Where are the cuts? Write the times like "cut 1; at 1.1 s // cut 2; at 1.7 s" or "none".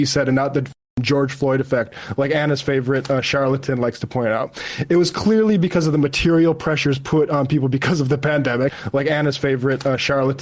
cut 1; at 8.7 s